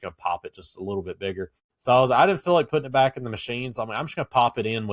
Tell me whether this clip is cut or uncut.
cut